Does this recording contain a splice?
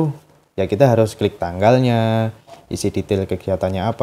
no; 0 cuts

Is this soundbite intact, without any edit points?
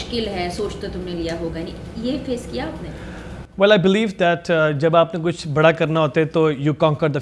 yes; 0 cuts

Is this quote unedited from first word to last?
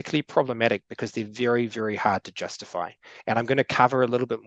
yes; 0 cuts

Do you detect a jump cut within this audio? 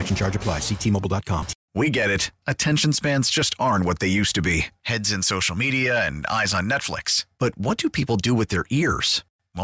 yes; 1 cut; at 1.6 s

